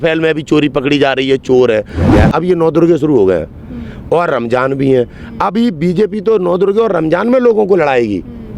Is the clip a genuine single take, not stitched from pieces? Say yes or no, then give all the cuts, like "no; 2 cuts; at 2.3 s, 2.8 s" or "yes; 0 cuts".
no; 1 cut; at 2.1 s